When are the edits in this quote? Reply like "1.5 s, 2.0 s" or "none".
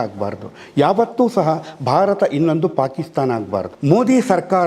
3.7 s